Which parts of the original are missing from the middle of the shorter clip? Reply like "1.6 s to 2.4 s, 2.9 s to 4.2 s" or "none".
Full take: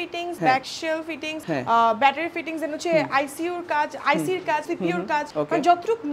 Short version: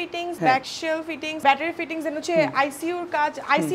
1.4 s to 2.0 s